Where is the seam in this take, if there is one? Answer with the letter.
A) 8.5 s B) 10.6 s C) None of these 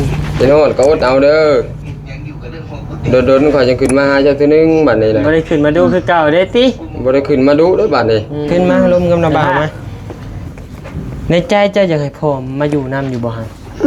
A